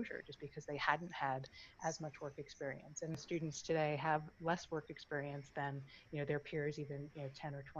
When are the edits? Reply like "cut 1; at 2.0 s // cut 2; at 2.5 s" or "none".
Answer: cut 1; at 3.2 s